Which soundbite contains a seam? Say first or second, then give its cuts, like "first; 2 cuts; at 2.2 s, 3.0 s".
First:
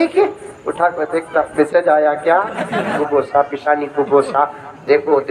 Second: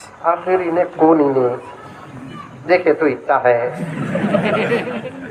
first; 1 cut; at 2.9 s